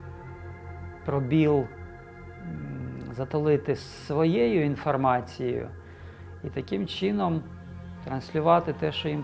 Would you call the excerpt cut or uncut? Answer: uncut